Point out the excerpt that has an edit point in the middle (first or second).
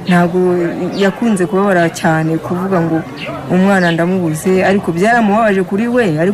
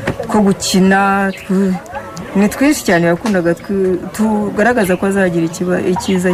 second